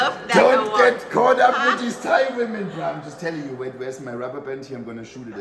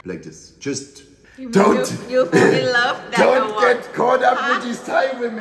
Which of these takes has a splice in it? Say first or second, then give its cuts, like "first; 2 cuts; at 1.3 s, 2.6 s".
second; 1 cut; at 1.2 s